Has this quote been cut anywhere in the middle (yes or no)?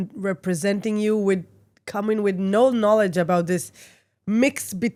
no